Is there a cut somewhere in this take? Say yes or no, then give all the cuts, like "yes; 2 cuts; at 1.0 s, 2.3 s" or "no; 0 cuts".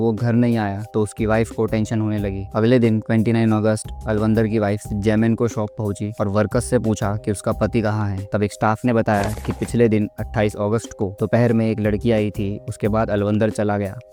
no; 0 cuts